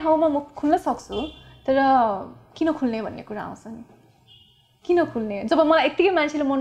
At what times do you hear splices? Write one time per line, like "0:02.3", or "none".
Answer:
none